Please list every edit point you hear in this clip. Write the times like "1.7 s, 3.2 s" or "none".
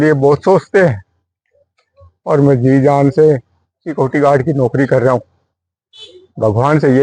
none